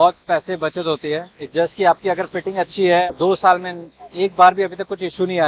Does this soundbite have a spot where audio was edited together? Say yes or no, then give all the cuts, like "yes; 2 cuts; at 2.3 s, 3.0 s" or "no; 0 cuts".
yes; 1 cut; at 3.1 s